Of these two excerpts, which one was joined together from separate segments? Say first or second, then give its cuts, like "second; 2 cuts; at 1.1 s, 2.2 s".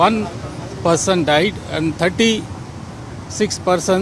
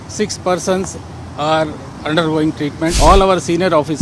second; 1 cut; at 2.9 s